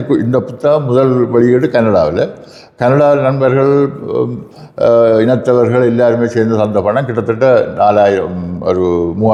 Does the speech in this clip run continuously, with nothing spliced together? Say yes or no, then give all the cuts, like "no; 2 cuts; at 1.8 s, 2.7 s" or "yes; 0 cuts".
yes; 0 cuts